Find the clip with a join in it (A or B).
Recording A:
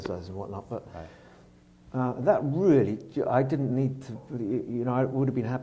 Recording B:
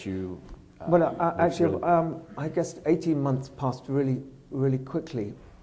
B